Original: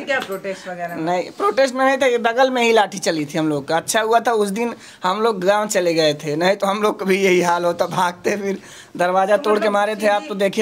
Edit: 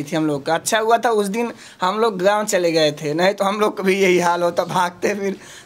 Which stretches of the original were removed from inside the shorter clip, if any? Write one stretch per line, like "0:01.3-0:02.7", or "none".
none